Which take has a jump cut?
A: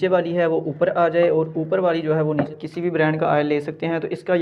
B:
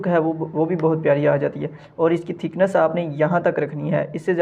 A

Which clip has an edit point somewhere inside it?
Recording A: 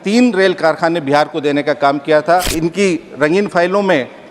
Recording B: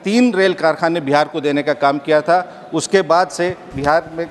A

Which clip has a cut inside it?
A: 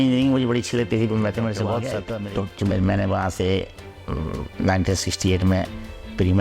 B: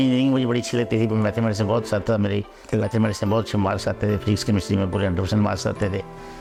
A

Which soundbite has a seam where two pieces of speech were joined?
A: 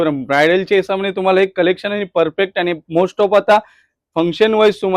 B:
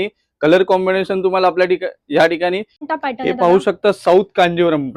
B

